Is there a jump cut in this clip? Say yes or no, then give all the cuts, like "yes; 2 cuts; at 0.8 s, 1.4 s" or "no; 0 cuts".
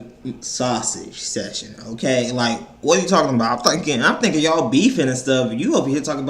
no; 0 cuts